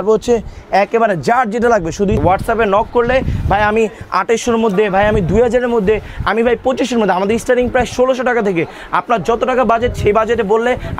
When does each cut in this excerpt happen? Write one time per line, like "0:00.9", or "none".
0:02.2